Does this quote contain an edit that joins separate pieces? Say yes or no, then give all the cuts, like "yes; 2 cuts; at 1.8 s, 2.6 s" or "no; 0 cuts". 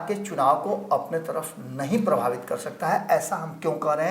no; 0 cuts